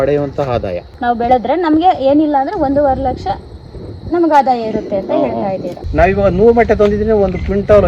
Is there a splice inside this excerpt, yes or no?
yes